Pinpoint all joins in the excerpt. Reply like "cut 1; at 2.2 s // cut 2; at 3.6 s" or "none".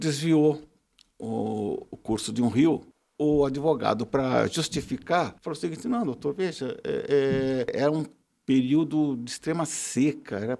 cut 1; at 2.9 s // cut 2; at 5.4 s // cut 3; at 7.7 s